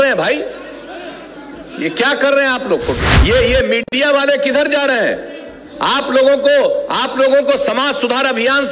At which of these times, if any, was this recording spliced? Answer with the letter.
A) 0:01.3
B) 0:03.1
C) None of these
B